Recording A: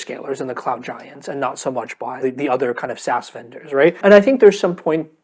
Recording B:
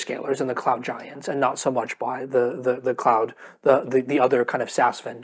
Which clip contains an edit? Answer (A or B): A